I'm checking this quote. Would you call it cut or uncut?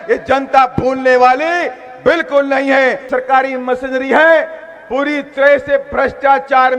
cut